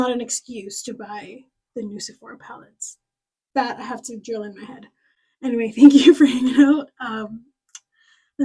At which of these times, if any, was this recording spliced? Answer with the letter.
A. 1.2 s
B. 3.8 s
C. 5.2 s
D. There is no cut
D